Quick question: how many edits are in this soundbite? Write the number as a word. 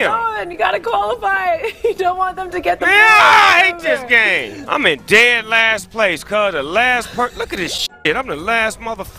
one